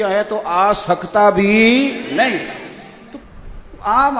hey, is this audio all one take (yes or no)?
no